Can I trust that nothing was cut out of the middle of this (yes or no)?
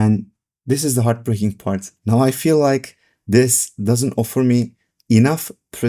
no